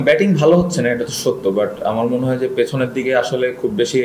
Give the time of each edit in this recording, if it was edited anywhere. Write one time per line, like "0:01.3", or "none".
none